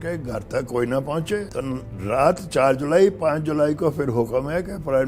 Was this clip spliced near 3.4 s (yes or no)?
no